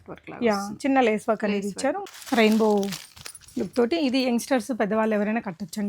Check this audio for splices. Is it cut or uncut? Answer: cut